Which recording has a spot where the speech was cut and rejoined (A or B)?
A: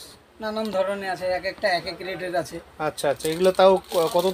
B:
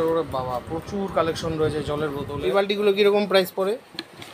B